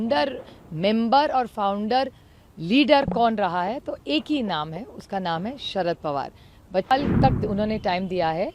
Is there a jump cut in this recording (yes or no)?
yes